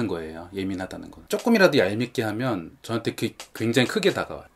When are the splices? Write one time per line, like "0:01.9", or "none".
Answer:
0:01.2